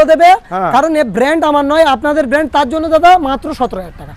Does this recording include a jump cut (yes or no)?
no